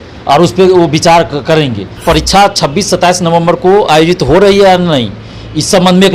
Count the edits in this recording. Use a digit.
1